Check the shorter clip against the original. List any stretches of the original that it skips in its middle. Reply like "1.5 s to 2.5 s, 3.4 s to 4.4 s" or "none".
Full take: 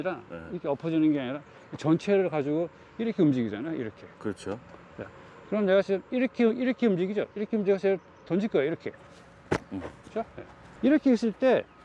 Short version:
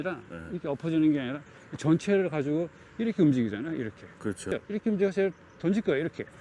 4.5 s to 7.2 s

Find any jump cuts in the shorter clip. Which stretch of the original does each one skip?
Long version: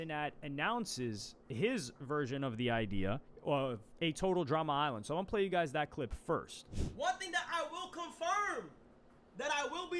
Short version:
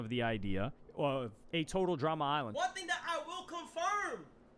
5.0 s to 7.0 s

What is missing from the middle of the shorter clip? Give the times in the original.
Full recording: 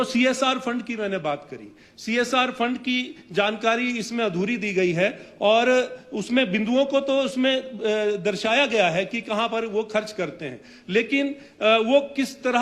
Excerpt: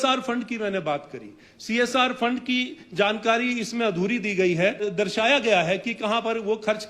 5.2 s to 8.1 s

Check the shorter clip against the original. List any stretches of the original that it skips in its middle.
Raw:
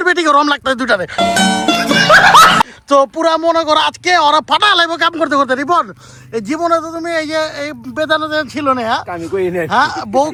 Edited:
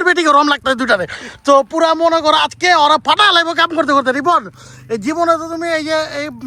1.2 s to 2.6 s

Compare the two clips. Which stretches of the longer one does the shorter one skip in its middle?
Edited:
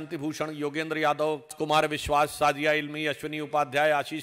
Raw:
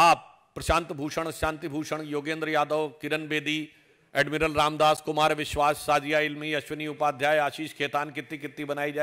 3.0 s to 5.0 s

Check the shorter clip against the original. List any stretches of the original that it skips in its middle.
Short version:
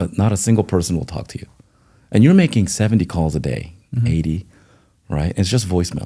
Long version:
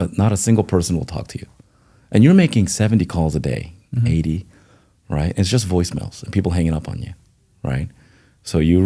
none

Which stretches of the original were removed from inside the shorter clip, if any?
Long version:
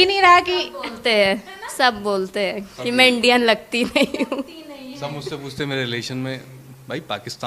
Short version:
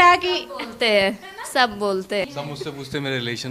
2.5 s to 4.9 s

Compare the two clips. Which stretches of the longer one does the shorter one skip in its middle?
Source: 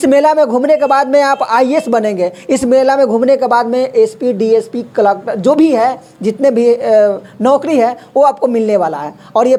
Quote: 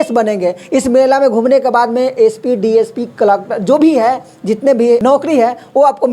6.8 s to 7.4 s

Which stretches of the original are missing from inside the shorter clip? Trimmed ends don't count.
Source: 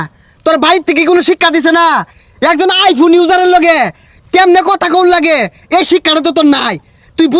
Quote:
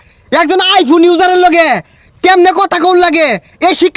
none

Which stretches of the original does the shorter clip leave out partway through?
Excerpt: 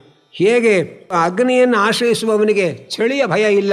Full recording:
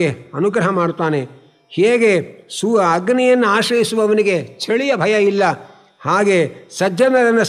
2.5 s to 2.8 s

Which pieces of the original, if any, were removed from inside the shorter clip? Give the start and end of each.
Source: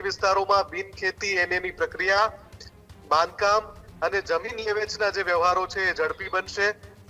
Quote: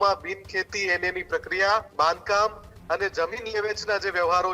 2.4 s to 3.0 s

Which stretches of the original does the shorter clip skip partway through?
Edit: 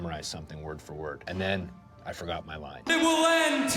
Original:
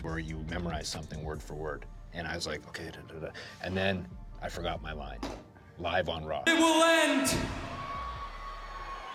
1.8 s to 3.6 s, 5.2 s to 6.4 s

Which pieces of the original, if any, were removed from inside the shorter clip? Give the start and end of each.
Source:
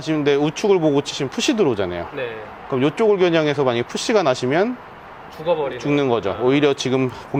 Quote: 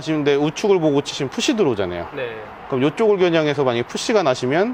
none

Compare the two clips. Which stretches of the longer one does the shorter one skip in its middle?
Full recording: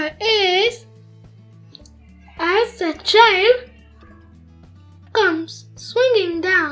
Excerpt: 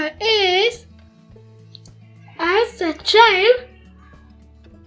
none

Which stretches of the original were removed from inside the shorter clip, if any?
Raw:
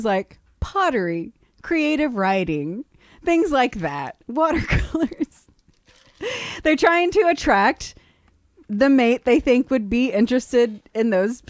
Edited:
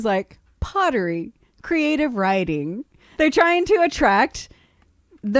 3.0 s to 6.5 s

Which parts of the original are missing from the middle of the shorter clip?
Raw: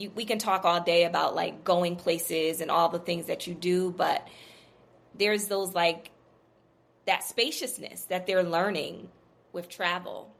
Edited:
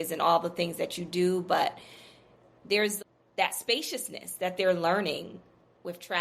5.4 s to 6.6 s

